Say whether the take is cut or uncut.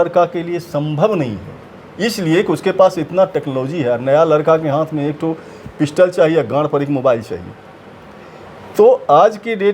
uncut